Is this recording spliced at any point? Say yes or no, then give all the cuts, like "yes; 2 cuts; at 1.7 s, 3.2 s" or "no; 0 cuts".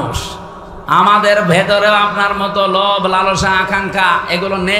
no; 0 cuts